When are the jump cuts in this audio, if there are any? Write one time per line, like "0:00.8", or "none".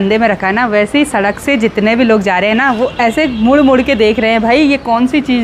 none

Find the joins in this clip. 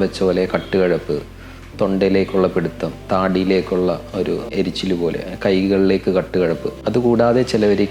0:04.5
0:06.7

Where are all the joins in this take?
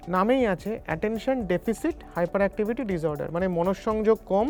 none

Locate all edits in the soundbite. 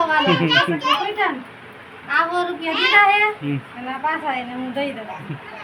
none

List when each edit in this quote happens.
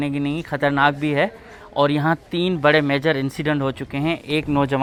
none

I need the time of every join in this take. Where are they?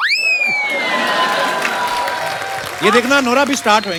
none

